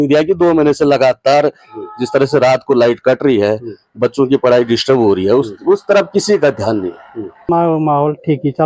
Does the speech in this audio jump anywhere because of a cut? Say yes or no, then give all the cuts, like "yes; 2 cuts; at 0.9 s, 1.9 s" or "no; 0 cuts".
yes; 1 cut; at 7.5 s